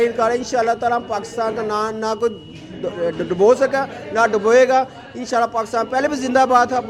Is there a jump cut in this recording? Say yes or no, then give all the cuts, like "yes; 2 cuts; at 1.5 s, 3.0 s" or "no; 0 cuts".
no; 0 cuts